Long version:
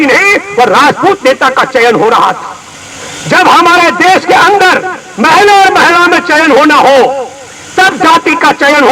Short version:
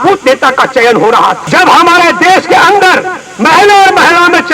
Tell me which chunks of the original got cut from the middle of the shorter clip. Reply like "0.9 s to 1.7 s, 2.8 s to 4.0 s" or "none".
2.4 s to 3.2 s